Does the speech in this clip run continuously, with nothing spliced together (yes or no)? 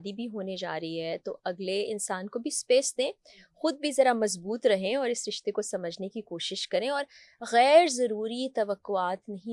yes